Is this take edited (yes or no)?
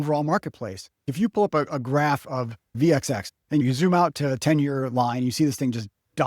yes